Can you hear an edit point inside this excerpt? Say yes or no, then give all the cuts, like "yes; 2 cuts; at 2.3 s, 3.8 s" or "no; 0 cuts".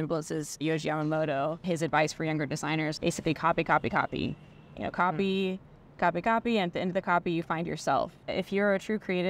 yes; 3 cuts; at 1.6 s, 2.9 s, 8.2 s